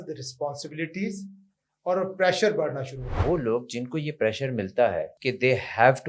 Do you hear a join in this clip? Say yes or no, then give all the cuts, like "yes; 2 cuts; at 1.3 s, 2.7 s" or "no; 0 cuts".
yes; 2 cuts; at 3.1 s, 5.1 s